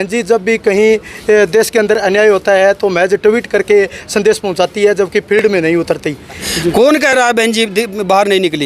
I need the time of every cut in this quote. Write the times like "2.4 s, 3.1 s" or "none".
6.5 s